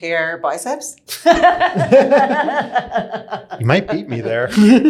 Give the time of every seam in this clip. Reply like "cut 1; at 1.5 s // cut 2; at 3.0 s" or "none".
none